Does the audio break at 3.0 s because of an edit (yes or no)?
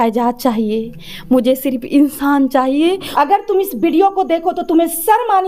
yes